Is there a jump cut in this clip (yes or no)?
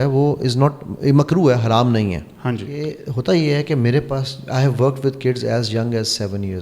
yes